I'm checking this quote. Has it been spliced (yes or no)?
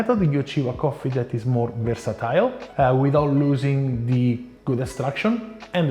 yes